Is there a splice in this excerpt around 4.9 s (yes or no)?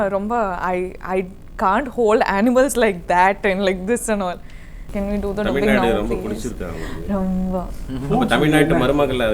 yes